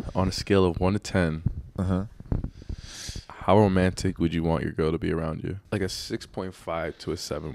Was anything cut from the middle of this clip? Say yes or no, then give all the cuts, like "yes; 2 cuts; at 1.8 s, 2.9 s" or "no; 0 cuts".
yes; 1 cut; at 5.6 s